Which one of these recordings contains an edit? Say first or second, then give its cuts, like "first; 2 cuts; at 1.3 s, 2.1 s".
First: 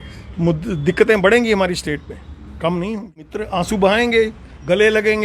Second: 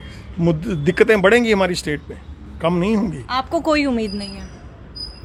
first; 1 cut; at 3.4 s